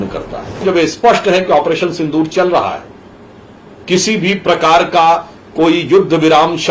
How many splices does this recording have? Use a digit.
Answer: 1